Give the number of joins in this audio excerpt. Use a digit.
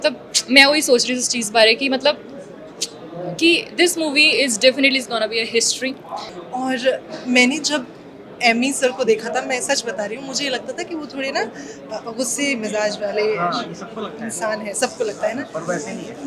1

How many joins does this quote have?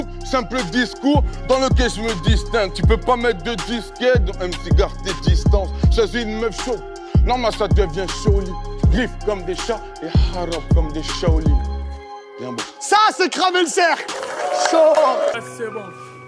1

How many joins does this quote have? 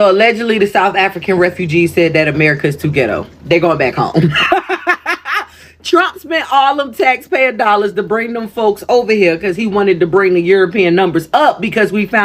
0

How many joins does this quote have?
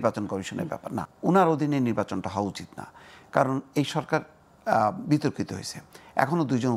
1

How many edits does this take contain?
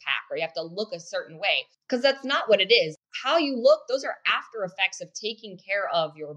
2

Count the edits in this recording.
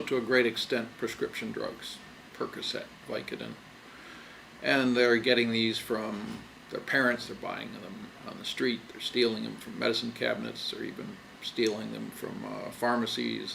1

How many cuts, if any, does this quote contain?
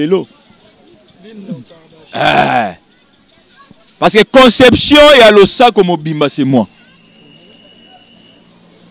0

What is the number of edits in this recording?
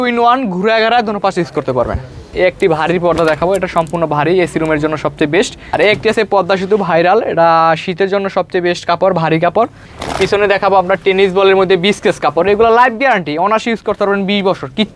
3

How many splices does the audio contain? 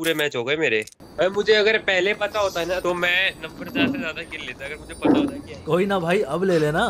3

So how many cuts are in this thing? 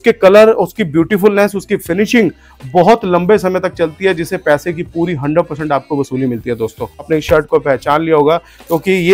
1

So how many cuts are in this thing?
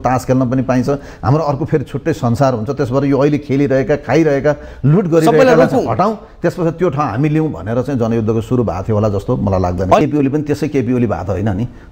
1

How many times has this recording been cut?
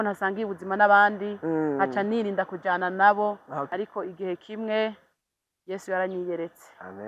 1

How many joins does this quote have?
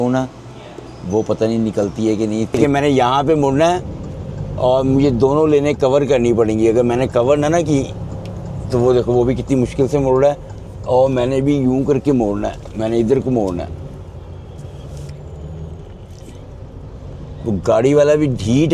1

